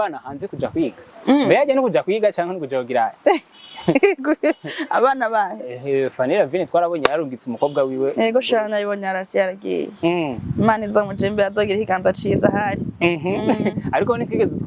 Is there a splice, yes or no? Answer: no